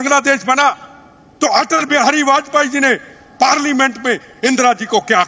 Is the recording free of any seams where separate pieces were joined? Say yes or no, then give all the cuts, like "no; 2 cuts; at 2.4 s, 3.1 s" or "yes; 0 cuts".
yes; 0 cuts